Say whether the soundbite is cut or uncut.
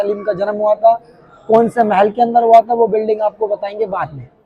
uncut